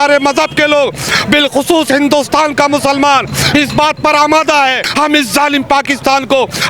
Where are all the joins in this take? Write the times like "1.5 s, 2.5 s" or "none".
4.8 s